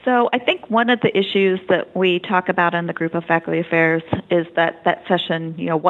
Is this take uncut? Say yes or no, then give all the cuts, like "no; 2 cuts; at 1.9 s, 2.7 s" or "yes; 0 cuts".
yes; 0 cuts